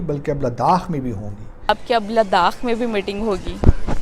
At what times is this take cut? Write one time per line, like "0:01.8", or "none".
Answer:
0:01.7